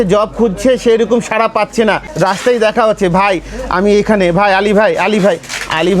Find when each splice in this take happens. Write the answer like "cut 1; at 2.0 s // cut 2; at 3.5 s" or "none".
cut 1; at 2.1 s